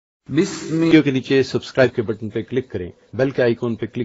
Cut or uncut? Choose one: cut